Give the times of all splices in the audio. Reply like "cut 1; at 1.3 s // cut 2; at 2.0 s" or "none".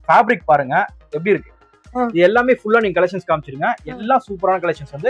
cut 1; at 1.9 s